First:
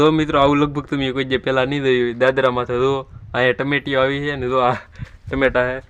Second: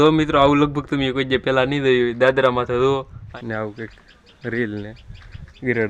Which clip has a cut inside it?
second; 1 cut; at 3.2 s

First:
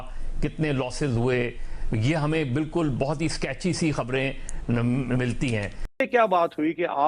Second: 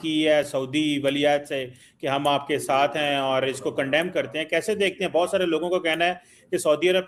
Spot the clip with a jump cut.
first; 1 cut; at 6.0 s

